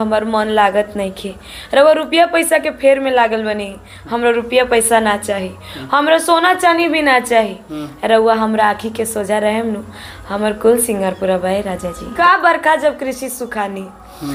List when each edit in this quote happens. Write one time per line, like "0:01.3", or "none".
none